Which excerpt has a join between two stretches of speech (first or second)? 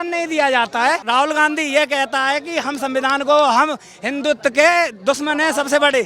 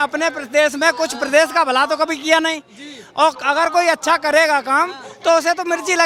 first